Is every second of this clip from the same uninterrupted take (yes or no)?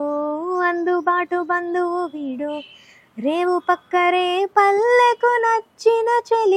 yes